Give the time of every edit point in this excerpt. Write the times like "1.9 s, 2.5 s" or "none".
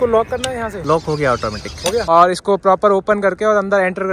2.1 s